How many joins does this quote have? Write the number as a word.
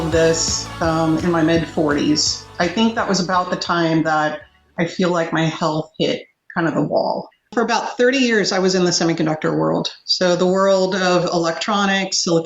two